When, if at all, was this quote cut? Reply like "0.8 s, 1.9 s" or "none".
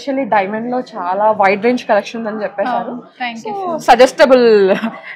none